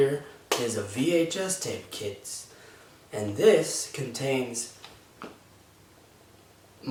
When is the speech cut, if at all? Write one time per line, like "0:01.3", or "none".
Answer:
none

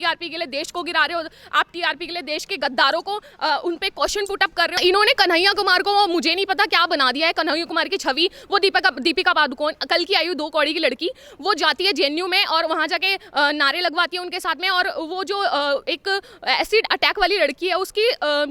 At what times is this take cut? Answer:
0:04.8

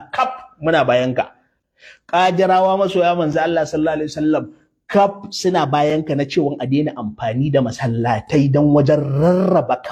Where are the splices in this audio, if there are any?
none

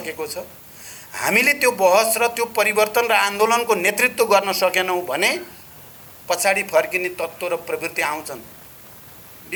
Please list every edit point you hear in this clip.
none

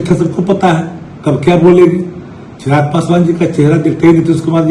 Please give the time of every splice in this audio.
none

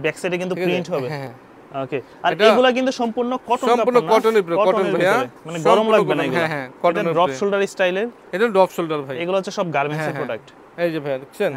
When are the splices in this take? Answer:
none

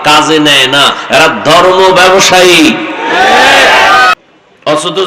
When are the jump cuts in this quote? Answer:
0:04.2

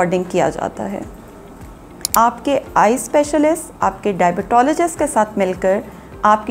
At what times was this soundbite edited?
0:02.0

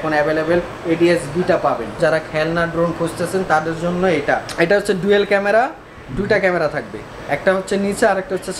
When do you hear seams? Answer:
0:02.0
0:04.5

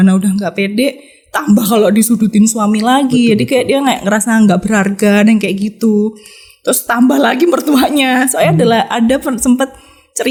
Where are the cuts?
none

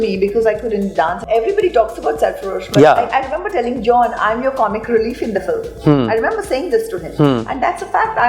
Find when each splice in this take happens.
0:01.2

